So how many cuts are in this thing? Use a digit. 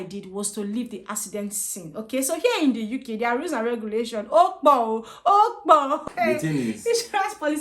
1